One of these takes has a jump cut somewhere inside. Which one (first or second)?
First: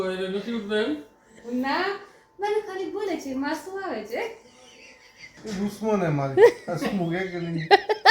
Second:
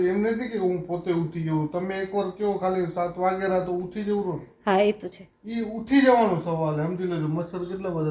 first